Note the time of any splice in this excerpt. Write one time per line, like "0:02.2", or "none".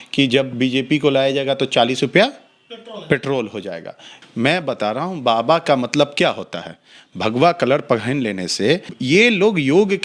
0:04.1
0:08.9